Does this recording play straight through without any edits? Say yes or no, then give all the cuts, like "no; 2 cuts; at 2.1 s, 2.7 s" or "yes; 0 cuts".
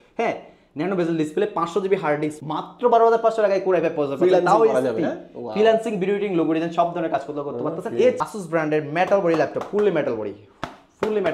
no; 2 cuts; at 2.4 s, 8.2 s